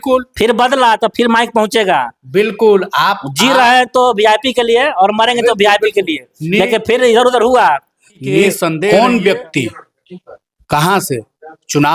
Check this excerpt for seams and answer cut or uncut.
cut